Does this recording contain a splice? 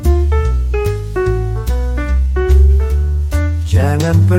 no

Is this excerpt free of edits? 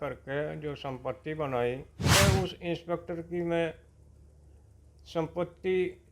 no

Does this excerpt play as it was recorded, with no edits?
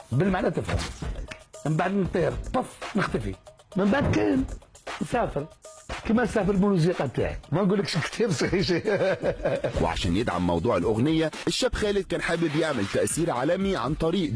no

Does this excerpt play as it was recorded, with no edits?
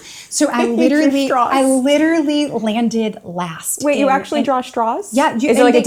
yes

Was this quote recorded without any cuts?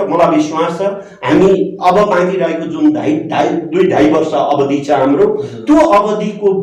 yes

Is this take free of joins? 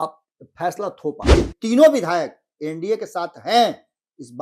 no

